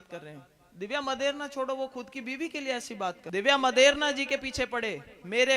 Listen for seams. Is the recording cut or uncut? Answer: cut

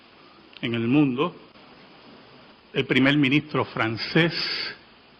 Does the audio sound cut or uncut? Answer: cut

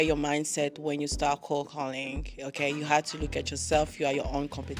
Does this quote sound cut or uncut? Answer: uncut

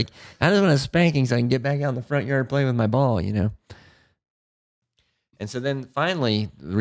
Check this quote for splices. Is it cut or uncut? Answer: cut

